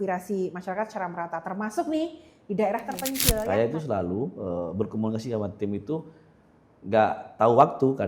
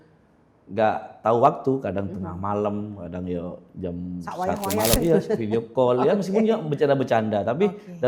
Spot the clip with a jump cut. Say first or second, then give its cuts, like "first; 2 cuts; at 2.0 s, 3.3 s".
first; 1 cut; at 3.4 s